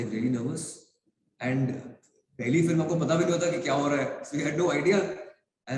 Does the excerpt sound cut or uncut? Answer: uncut